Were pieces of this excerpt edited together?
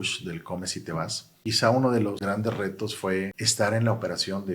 yes; 3 cuts; at 1.4 s, 2.2 s, 3.4 s

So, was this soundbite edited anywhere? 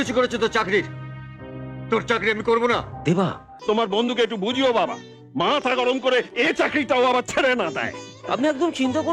yes; 1 cut; at 3.5 s

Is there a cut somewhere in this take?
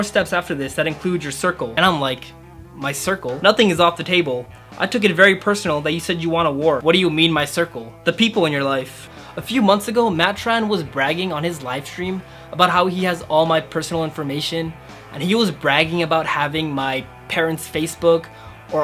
yes; 2 cuts; at 6.8 s, 9.1 s

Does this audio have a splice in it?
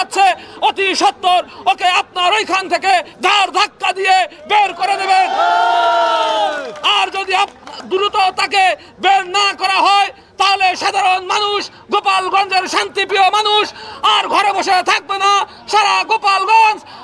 no; 0 cuts

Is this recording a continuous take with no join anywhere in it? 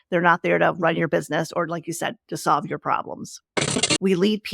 no; 1 cut; at 3.6 s

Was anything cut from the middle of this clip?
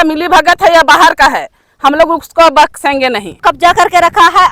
yes; 1 cut; at 3.4 s

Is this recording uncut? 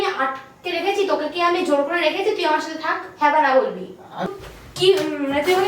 no; 1 cut; at 4.3 s

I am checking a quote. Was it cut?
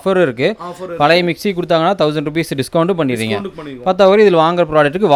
no; 0 cuts

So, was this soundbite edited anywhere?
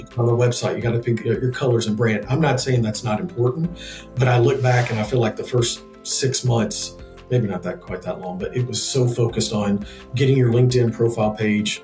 no; 0 cuts

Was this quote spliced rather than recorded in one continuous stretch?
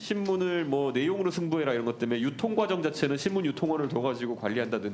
no; 0 cuts

